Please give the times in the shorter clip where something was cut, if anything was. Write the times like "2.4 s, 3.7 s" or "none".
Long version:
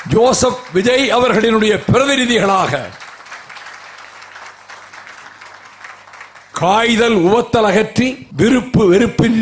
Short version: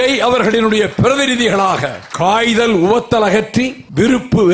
2.0 s